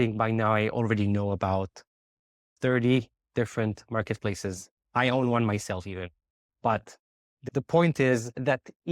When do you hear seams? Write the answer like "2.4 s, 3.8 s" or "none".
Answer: 2.5 s